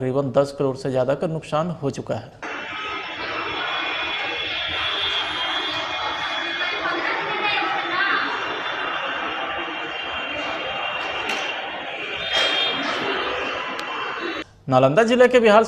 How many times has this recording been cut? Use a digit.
1